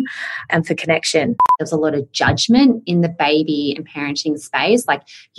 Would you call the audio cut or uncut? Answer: cut